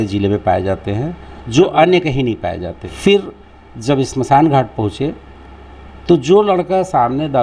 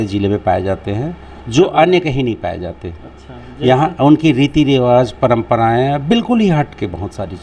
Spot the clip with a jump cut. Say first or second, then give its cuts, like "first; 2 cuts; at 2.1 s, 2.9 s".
first; 1 cut; at 2.8 s